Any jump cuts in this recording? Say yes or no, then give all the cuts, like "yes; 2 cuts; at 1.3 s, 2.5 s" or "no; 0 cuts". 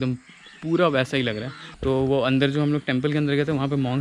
no; 0 cuts